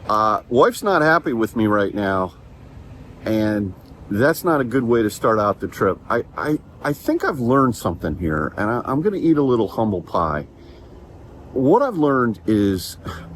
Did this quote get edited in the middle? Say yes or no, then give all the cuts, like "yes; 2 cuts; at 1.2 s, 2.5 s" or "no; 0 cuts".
no; 0 cuts